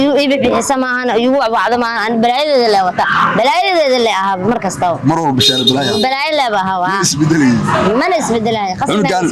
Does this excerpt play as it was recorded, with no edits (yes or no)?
yes